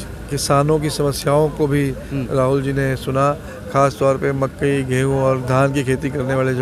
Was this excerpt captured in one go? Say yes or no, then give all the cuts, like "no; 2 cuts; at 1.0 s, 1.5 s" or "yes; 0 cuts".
yes; 0 cuts